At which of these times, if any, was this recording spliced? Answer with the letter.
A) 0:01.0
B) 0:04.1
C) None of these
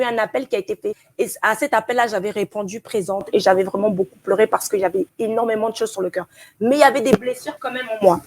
A